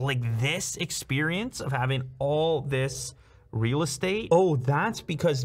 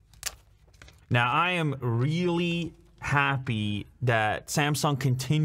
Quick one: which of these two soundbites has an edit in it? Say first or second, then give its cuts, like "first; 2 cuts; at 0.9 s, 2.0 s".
first; 1 cut; at 4.2 s